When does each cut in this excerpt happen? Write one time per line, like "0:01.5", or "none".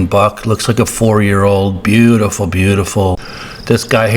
0:03.2